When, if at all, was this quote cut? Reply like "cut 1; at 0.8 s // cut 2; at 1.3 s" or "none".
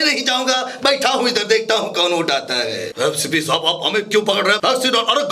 cut 1; at 3.0 s

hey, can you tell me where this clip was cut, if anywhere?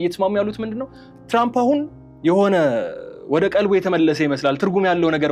none

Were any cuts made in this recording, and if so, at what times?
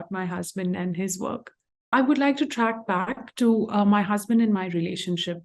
cut 1; at 1.9 s

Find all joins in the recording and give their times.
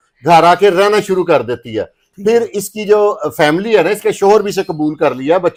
none

